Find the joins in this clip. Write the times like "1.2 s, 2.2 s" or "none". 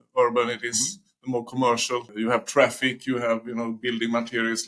2.1 s